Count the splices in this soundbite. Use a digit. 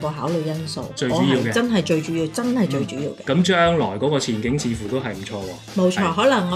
1